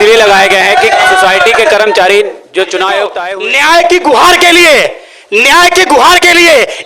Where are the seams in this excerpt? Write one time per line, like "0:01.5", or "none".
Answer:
0:03.2